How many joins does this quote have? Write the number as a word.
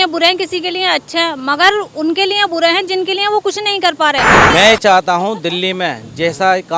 one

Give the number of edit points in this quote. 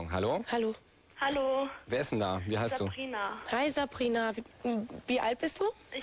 zero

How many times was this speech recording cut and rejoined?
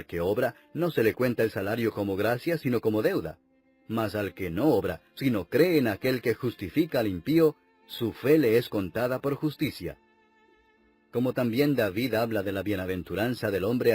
one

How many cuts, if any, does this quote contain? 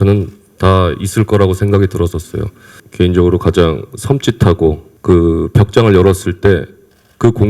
two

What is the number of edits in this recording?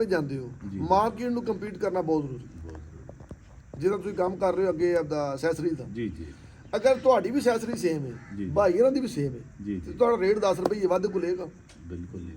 zero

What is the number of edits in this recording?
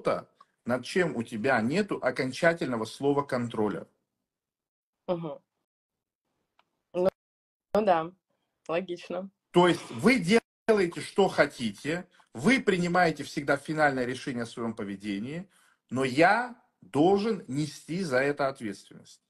zero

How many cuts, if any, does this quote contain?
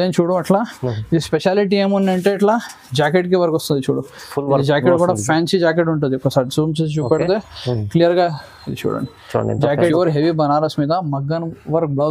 one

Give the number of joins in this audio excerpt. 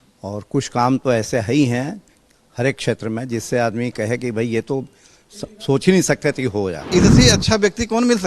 one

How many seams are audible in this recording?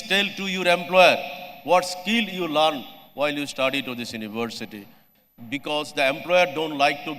one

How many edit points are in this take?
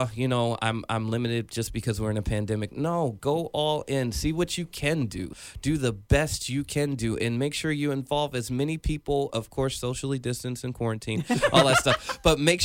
one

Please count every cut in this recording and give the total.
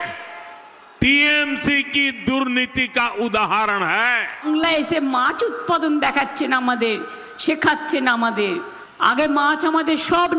one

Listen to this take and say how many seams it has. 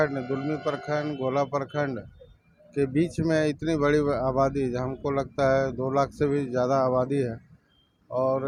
zero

